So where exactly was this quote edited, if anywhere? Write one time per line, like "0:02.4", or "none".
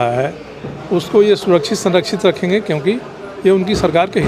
none